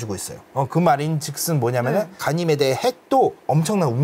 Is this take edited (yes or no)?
no